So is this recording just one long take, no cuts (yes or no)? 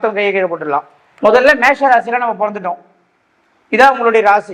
no